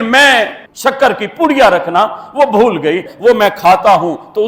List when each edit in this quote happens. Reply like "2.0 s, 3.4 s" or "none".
3.1 s